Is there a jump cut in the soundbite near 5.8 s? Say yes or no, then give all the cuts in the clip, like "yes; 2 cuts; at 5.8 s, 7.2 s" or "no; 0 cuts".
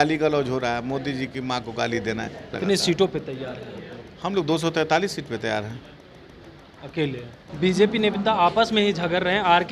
no; 2 cuts; at 2.5 s, 7.4 s